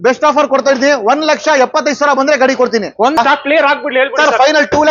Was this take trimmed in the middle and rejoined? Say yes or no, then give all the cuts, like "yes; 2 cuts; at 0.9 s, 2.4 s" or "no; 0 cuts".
yes; 1 cut; at 3.0 s